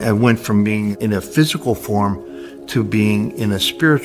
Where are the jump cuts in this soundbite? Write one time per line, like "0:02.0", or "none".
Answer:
0:01.0